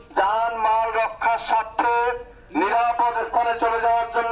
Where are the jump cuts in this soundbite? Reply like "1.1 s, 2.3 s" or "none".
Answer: none

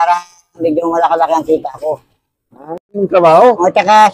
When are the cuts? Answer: 3.0 s

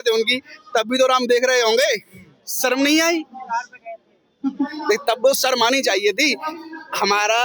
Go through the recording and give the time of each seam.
none

